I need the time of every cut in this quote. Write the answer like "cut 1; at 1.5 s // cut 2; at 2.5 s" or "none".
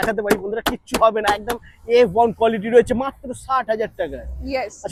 none